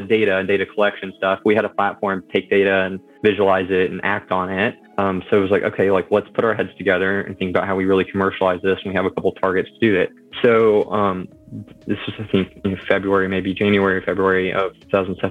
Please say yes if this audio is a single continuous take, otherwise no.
no